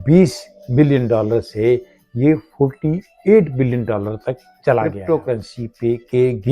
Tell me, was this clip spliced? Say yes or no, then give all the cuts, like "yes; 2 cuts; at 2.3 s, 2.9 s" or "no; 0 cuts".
yes; 1 cut; at 5.0 s